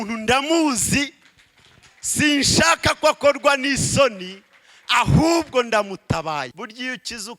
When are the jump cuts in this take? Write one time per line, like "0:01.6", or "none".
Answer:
0:06.5